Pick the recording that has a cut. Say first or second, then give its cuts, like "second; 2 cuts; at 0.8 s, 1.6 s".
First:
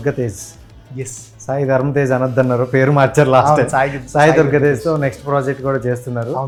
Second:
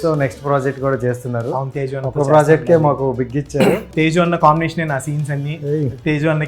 second; 1 cut; at 3.9 s